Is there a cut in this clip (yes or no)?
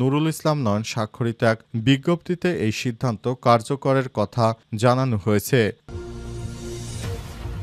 yes